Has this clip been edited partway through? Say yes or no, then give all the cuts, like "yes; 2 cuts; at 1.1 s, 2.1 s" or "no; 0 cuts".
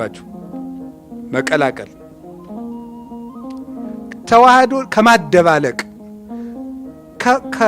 yes; 2 cuts; at 2.0 s, 4.2 s